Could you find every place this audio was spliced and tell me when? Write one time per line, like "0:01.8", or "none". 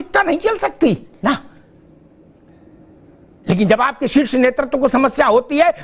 none